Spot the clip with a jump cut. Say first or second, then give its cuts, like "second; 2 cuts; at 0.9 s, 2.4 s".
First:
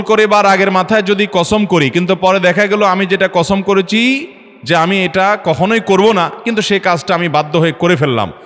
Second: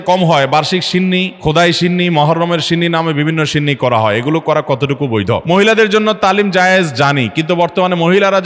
second; 2 cuts; at 1.3 s, 5.4 s